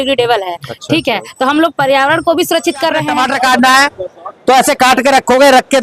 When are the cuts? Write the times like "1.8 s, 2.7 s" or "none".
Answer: 3.0 s